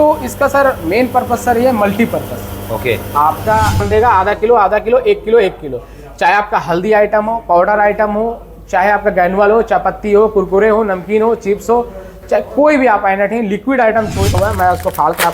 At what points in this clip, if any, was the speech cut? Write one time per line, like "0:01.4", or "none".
0:03.8
0:14.3